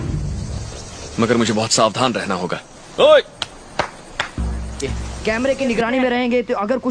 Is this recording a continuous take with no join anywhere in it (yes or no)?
no